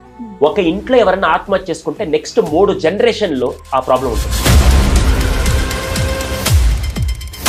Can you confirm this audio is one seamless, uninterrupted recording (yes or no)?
yes